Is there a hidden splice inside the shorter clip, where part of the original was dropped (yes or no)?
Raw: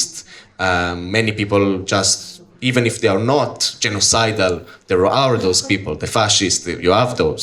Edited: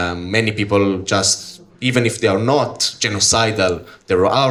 no